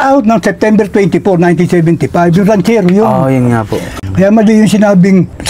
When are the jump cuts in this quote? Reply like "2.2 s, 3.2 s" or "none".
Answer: 4.0 s